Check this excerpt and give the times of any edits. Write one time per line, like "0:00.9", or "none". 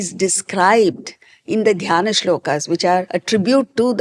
0:03.1